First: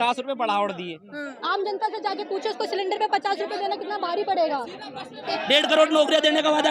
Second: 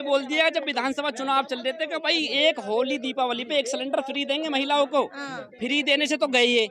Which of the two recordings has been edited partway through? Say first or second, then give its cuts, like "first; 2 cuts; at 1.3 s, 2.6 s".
first; 2 cuts; at 1.4 s, 5.2 s